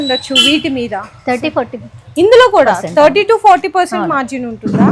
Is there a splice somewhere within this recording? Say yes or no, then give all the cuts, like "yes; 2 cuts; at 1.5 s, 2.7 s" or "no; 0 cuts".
no; 0 cuts